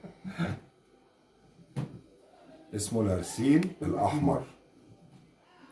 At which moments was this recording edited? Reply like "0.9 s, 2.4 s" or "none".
none